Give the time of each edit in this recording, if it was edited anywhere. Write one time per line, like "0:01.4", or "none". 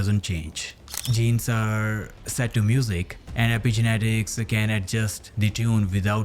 0:01.0
0:03.2